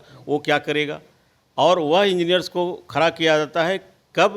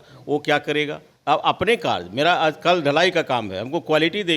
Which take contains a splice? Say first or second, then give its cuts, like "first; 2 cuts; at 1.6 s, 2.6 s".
second; 1 cut; at 1.1 s